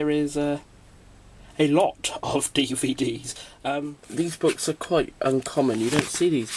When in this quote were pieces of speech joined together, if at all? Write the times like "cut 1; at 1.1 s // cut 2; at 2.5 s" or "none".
cut 1; at 3.8 s

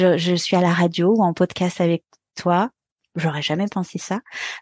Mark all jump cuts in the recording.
none

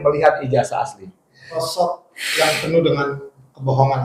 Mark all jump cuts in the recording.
cut 1; at 1.6 s

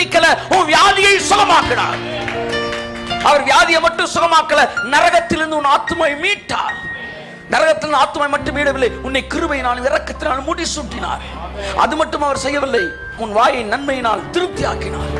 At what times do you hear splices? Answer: cut 1; at 13.1 s

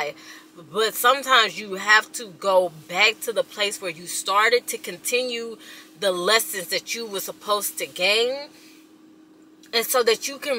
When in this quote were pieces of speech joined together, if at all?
none

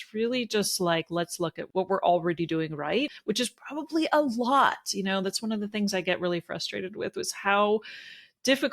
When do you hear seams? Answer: cut 1; at 1.6 s // cut 2; at 3.1 s

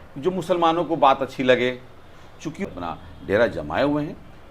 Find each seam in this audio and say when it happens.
cut 1; at 2.7 s

